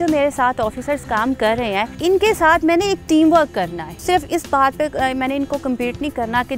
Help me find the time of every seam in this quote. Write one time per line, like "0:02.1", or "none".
0:01.9
0:04.0

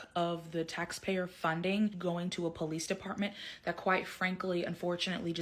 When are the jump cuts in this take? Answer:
0:02.0

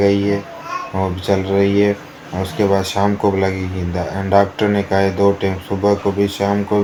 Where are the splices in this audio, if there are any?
none

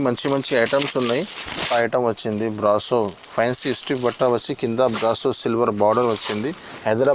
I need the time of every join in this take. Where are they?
0:01.7

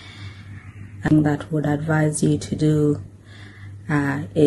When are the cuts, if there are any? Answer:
0:01.1

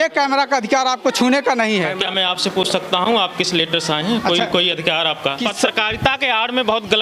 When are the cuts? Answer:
0:02.0
0:05.4

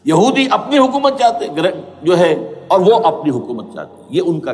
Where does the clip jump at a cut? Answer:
none

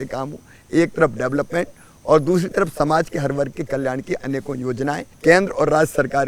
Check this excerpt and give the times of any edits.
0:05.1

